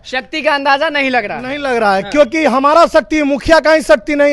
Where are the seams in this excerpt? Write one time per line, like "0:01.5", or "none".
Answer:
none